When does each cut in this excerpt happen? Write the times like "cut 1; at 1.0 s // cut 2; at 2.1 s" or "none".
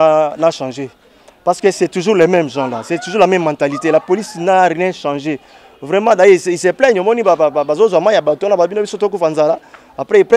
none